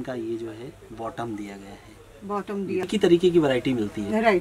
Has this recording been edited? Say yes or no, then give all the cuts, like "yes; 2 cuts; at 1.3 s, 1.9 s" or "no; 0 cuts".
yes; 1 cut; at 2.8 s